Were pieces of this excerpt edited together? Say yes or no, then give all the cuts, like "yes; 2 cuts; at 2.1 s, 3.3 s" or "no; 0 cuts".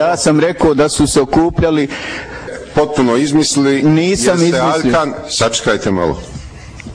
no; 0 cuts